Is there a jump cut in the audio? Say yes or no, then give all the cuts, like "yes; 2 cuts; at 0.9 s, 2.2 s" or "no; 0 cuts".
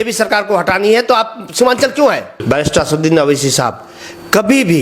yes; 1 cut; at 2.3 s